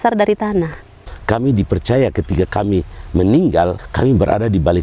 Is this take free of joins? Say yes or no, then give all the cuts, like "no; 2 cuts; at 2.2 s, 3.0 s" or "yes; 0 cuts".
no; 2 cuts; at 1.1 s, 3.8 s